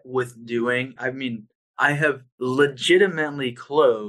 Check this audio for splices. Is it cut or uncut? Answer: cut